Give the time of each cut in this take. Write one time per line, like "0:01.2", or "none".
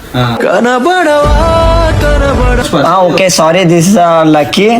0:02.6

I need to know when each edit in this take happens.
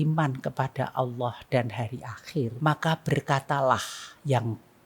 0:02.5

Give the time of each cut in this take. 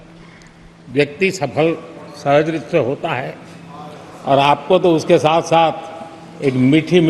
none

